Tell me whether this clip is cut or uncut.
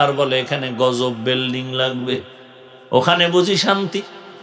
uncut